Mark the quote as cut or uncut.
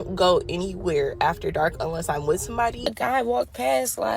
cut